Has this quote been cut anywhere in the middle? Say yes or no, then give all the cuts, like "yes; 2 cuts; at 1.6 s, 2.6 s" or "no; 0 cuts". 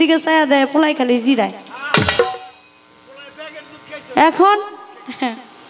no; 0 cuts